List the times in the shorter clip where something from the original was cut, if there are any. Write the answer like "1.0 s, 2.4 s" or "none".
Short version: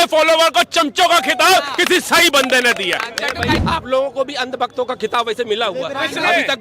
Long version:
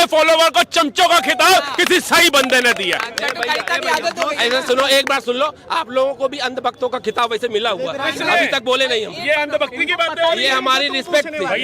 3.6 s